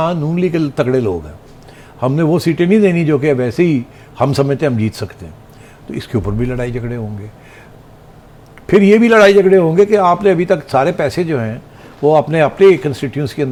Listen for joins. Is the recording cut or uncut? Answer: uncut